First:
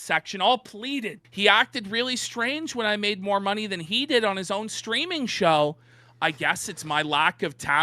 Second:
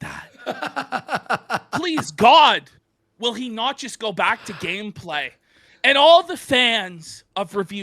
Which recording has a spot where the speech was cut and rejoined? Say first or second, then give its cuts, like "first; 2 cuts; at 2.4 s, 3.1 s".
first; 1 cut; at 1.2 s